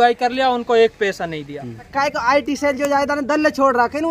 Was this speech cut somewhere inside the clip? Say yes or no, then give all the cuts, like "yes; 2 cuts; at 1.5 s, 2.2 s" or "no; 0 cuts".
yes; 1 cut; at 1.9 s